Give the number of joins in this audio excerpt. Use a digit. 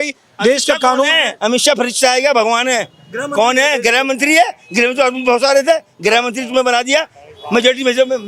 0